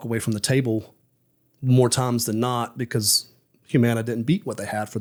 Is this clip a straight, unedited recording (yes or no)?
yes